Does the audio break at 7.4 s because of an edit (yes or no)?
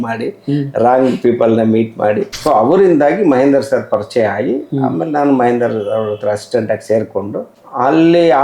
yes